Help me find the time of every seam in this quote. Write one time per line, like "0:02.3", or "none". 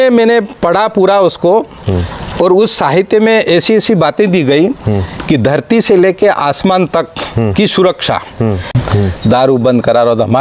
0:08.8

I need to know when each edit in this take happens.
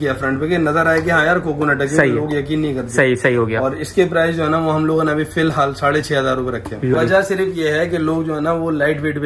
0:07.0

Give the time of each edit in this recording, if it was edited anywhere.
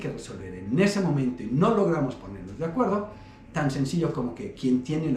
none

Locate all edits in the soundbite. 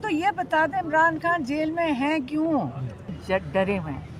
0:03.1

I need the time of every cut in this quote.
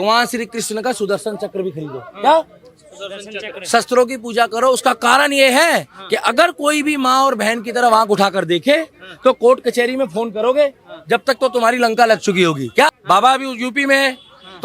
0:12.9

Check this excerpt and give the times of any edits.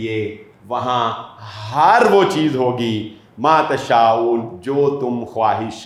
none

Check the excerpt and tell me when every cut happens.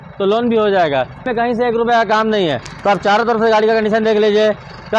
0:01.3

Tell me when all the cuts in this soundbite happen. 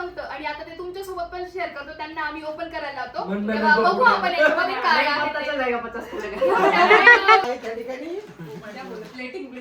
0:07.4

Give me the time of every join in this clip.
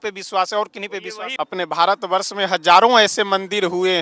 0:01.2

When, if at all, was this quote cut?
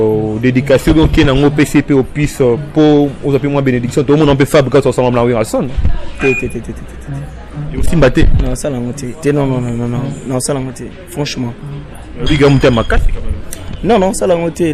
none

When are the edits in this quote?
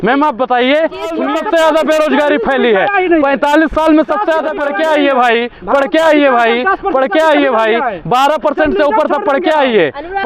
0:01.2
0:04.5

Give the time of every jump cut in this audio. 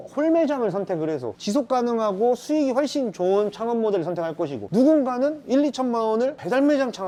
none

